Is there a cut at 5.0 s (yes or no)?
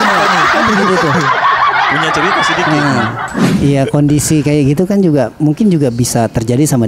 no